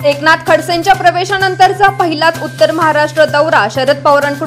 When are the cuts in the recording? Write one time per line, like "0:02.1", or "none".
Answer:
none